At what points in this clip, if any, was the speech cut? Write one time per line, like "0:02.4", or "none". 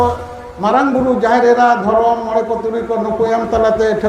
none